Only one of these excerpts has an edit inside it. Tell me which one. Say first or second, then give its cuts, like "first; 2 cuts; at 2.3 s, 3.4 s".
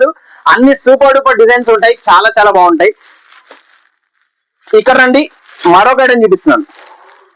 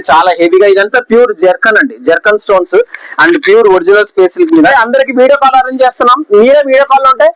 second; 1 cut; at 4.7 s